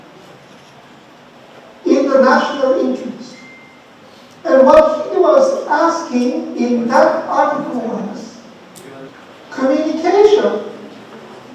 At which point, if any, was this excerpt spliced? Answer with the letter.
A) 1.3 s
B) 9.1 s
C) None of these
B